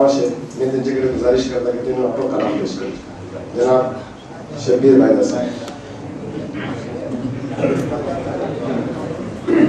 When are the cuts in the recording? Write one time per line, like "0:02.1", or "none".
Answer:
0:06.8

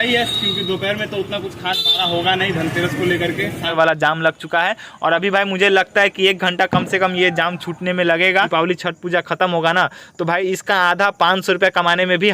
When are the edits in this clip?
0:03.7
0:08.5

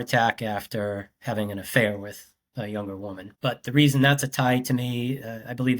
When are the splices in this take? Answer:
0:03.3

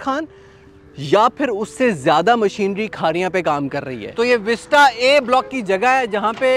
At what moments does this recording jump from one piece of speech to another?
0:04.0

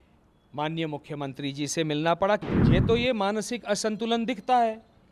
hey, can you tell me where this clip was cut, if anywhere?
0:02.4

